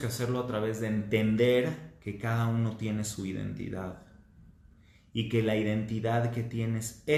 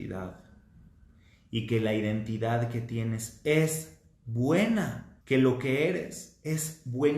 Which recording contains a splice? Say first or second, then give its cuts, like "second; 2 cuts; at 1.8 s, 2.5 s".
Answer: second; 1 cut; at 5.1 s